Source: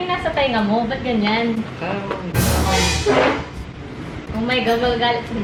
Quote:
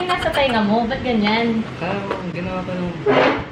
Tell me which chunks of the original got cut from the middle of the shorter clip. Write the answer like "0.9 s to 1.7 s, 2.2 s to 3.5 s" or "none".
none